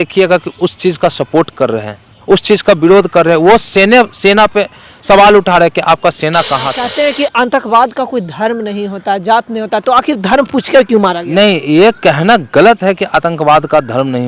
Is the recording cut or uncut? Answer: cut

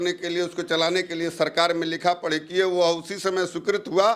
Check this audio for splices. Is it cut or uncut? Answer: uncut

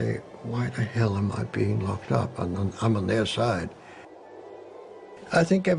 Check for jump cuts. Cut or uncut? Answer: cut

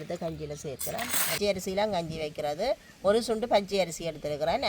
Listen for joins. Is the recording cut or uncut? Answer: cut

